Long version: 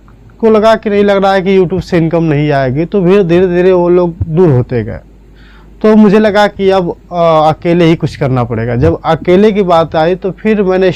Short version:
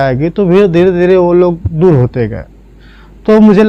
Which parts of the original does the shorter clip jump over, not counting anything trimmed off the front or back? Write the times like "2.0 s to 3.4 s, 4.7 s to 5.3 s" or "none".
none